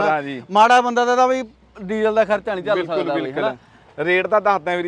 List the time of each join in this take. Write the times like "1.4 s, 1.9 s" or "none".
none